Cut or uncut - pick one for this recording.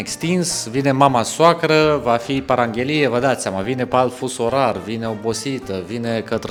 uncut